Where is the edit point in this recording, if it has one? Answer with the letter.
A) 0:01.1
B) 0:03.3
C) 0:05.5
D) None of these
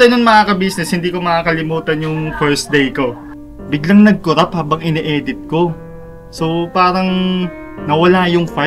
B